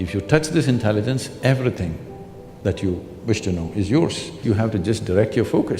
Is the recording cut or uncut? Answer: cut